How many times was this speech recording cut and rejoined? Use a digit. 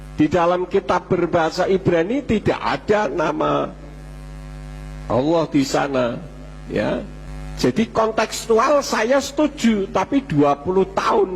1